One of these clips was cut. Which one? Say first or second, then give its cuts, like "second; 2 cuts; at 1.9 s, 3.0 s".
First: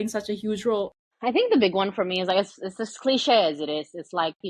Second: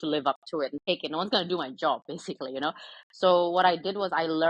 first; 1 cut; at 1.1 s